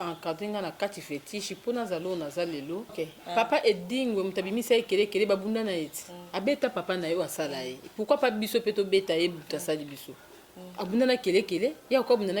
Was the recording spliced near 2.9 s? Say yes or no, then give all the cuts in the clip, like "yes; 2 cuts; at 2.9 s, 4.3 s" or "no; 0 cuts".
yes; 1 cut; at 2.9 s